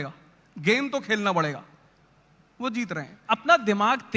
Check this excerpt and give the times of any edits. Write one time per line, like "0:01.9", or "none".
0:03.2